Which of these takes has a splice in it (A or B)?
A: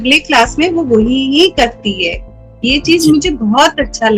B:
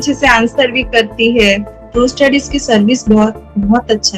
B